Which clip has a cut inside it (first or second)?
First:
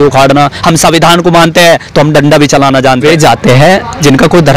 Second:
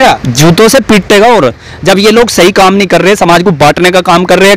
first